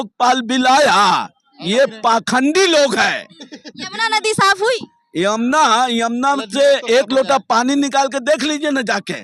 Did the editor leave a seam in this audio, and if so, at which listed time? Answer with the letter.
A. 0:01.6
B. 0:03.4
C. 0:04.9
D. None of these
D